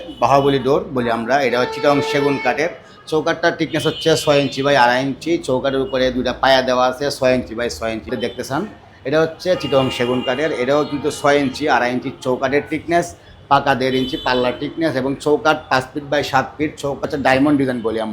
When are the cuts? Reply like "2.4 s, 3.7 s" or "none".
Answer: 8.1 s, 17.0 s